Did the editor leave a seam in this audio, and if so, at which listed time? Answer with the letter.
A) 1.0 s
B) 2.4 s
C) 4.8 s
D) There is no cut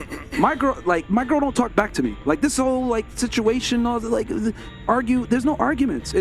A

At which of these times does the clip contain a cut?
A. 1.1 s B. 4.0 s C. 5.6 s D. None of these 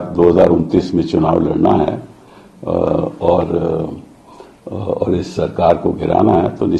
D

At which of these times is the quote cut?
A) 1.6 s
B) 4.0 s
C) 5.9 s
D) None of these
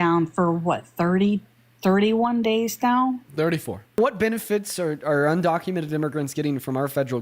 B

